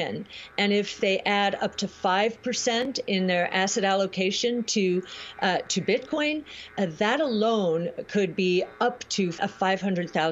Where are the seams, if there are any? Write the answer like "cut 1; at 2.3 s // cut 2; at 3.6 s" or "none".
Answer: cut 1; at 0.9 s // cut 2; at 9.4 s

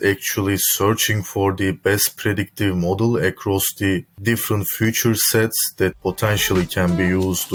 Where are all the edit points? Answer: none

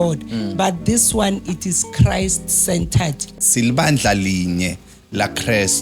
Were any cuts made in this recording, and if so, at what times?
cut 1; at 3.4 s

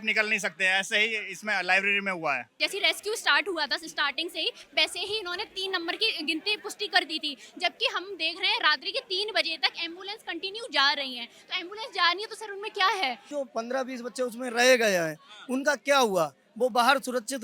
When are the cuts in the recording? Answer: cut 1; at 2.6 s // cut 2; at 13.3 s

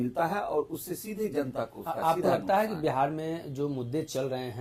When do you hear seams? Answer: none

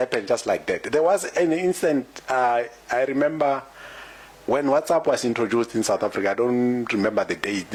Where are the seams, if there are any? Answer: none

